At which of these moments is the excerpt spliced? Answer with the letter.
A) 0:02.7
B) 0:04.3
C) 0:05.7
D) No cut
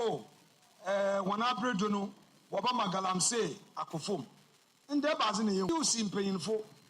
C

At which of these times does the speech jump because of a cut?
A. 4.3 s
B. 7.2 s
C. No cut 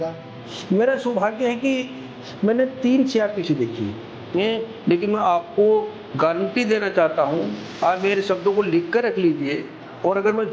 A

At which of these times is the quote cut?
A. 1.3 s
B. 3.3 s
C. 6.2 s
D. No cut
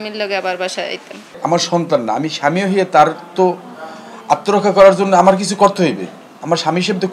A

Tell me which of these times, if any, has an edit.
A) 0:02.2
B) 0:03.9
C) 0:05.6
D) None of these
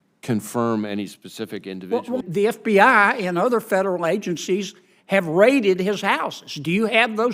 A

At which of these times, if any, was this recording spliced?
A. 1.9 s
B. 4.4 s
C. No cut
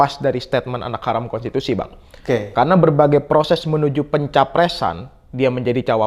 C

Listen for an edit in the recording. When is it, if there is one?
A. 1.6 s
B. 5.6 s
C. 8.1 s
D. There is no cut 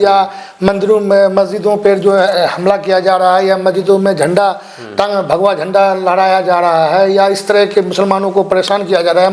D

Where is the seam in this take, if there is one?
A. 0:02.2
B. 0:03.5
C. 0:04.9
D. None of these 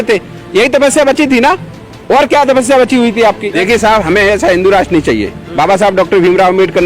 B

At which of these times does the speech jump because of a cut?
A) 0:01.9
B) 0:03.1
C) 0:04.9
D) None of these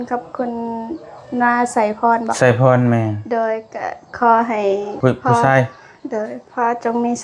C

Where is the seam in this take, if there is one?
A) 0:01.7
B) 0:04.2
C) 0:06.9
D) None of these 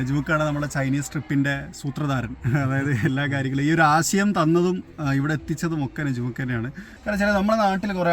C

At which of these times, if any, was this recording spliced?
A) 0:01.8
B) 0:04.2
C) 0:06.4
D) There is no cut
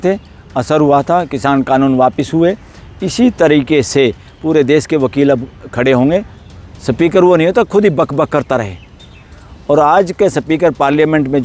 C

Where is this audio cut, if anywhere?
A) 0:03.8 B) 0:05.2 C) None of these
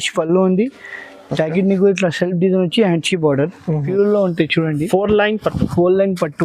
A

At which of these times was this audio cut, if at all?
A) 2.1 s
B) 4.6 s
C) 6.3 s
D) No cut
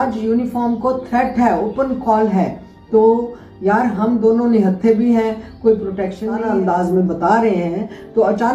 C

